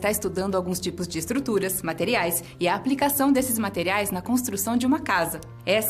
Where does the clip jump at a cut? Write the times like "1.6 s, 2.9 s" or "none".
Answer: 1.2 s